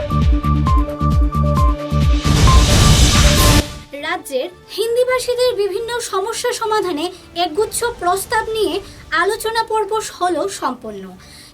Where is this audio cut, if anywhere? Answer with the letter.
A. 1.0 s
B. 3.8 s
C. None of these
B